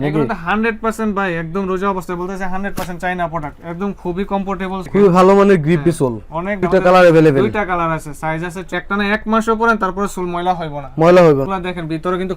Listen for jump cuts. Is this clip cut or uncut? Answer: cut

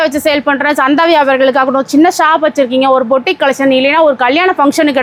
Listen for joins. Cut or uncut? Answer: uncut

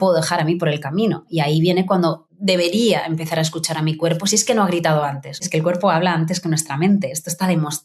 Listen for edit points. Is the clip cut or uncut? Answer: cut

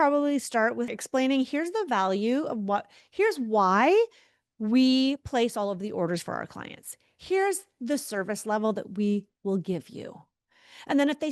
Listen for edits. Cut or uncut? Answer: cut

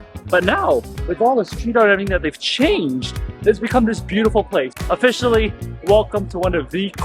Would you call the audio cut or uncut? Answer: cut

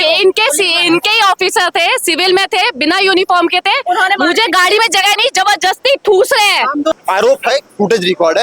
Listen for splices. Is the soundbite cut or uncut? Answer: cut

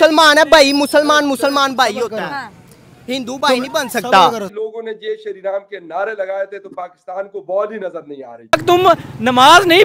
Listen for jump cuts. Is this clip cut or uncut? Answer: cut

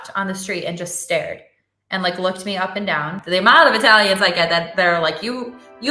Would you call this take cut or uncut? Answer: cut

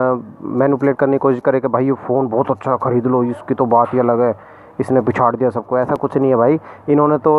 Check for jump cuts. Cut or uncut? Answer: uncut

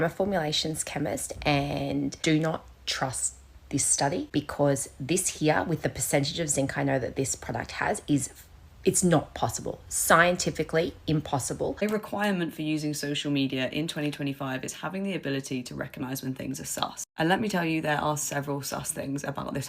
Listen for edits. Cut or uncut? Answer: cut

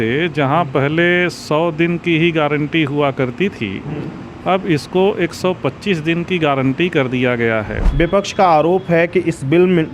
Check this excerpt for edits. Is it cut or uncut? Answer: cut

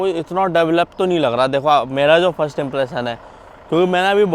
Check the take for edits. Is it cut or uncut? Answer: uncut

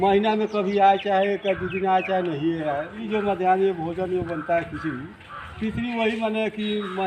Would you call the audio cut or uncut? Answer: cut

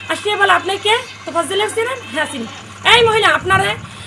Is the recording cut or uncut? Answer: uncut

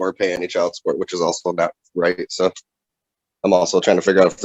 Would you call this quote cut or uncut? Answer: uncut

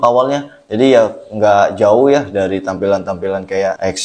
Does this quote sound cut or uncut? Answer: uncut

